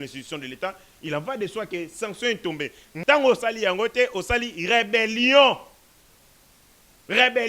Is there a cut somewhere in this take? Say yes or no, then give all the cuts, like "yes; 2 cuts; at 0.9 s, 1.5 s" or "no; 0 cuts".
yes; 1 cut; at 2.9 s